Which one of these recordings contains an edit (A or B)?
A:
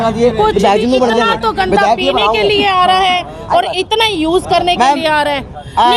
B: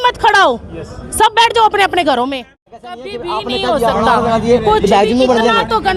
B